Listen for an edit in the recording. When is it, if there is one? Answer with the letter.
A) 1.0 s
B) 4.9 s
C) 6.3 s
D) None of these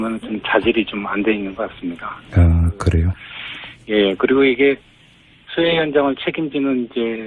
B